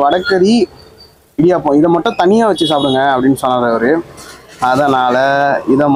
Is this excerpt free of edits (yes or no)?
yes